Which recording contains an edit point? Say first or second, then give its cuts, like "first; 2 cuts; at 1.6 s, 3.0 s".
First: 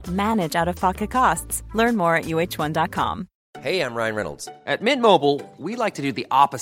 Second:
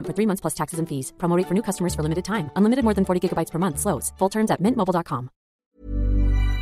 second; 1 cut; at 5.6 s